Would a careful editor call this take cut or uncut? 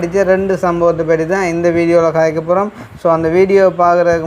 uncut